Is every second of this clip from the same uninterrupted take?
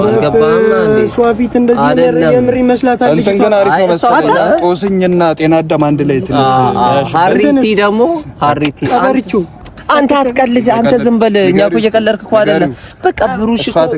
yes; 0 cuts

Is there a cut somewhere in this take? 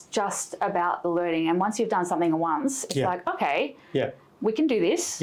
no; 0 cuts

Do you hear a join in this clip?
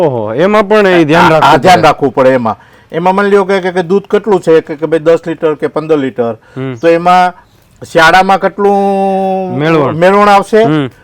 no; 0 cuts

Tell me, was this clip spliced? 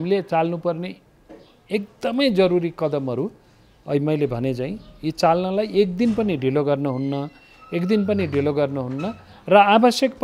no; 0 cuts

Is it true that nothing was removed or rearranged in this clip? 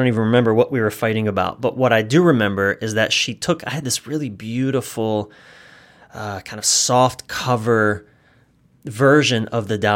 yes; 0 cuts

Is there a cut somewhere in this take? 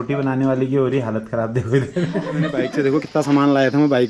yes; 1 cut; at 2.6 s

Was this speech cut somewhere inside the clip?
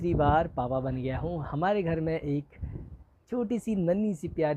no; 0 cuts

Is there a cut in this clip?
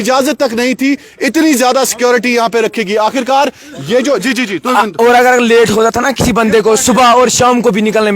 no; 0 cuts

